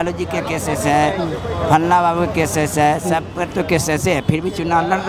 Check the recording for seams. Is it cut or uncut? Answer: uncut